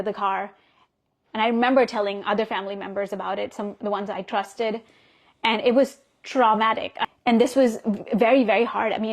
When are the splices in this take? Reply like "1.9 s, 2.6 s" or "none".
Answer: 6.9 s

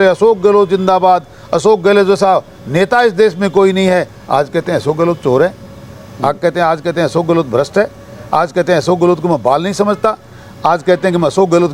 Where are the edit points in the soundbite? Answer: none

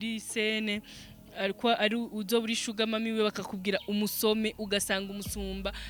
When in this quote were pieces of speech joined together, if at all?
none

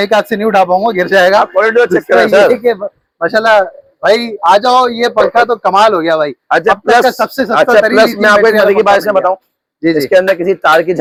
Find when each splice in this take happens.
none

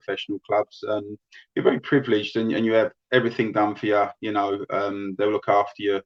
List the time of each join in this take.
none

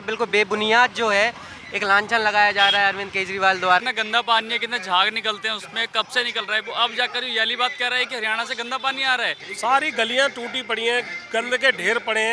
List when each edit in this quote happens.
3.8 s, 9.4 s

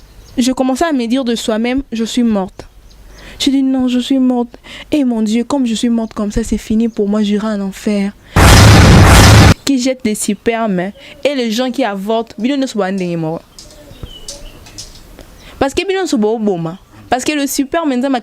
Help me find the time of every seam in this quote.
8.2 s, 9.6 s, 13.5 s

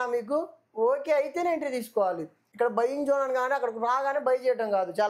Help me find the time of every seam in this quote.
2.4 s

